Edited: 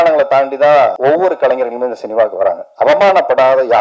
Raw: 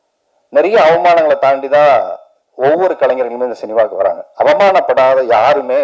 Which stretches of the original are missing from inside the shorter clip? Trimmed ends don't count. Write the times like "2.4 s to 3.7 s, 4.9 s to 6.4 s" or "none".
2.1 s to 2.5 s